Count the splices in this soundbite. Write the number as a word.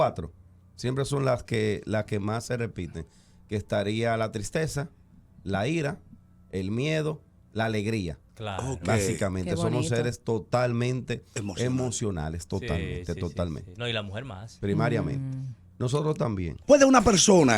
two